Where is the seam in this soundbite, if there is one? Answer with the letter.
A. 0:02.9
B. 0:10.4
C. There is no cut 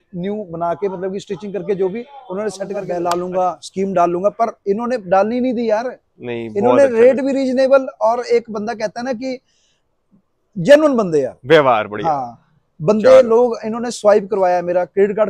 A